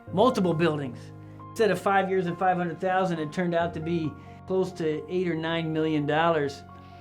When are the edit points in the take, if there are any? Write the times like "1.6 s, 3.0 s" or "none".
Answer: 1.5 s, 4.4 s